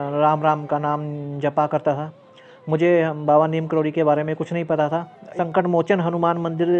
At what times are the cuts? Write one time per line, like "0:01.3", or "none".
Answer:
0:05.3

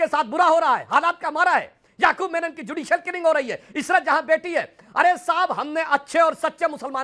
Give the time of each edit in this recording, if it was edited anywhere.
none

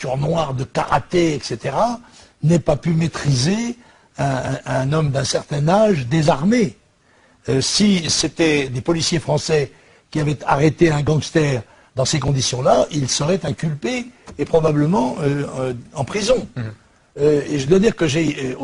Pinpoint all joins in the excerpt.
0:12.8

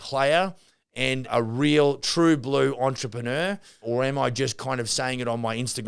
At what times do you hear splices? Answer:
0:01.3
0:03.8

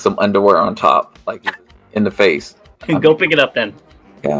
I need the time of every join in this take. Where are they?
0:01.2

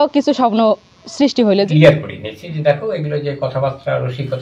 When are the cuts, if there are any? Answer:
0:01.7

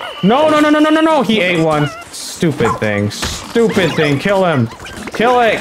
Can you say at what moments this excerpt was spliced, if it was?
0:02.0

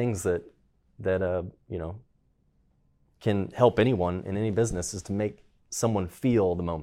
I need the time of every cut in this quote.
none

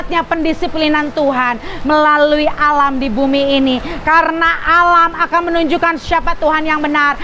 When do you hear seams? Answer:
none

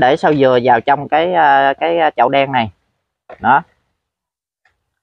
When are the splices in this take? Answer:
none

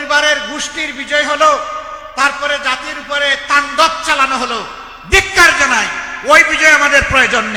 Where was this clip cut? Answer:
none

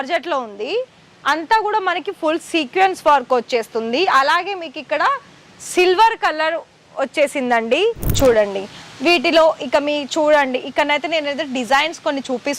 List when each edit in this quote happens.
0:08.2

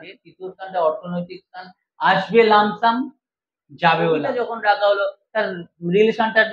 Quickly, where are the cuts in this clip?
0:04.3

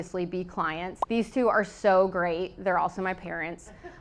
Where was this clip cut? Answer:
0:00.9

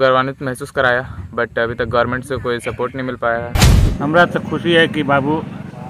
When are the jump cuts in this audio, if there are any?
0:03.8

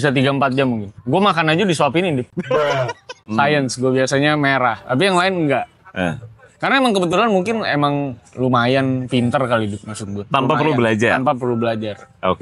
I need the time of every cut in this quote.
0:03.2

